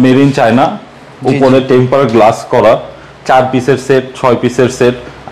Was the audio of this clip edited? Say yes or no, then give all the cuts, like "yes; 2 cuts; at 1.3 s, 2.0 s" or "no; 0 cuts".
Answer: no; 0 cuts